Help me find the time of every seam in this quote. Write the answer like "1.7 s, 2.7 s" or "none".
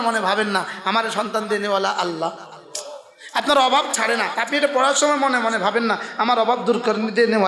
none